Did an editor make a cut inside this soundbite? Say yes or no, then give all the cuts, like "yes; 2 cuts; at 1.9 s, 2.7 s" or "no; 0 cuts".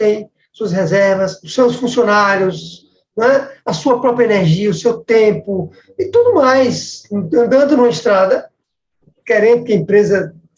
yes; 1 cut; at 1.4 s